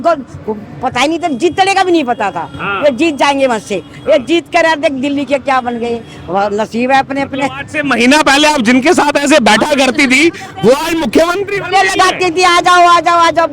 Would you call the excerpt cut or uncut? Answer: uncut